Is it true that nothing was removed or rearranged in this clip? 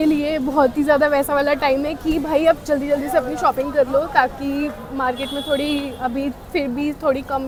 yes; 0 cuts

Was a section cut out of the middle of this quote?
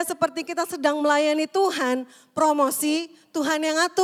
no; 0 cuts

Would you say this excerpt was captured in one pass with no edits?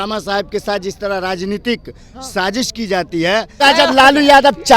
no; 1 cut; at 3.6 s

